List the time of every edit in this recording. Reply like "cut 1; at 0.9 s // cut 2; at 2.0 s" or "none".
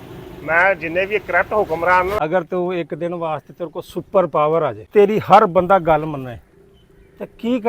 cut 1; at 2.1 s // cut 2; at 4.8 s